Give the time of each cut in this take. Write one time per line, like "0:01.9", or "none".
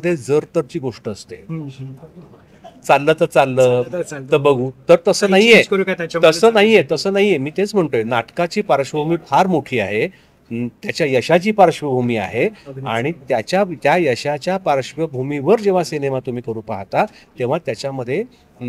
none